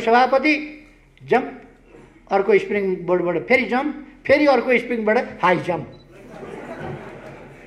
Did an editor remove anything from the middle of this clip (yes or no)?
no